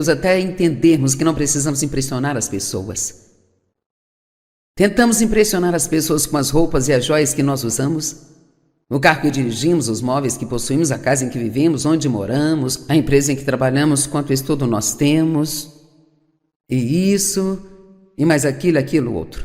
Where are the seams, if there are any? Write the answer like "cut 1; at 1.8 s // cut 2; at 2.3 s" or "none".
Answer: cut 1; at 9.0 s